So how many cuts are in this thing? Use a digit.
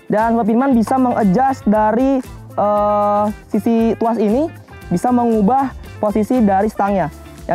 0